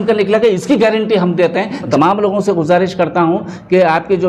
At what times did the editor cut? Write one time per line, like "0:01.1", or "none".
0:01.9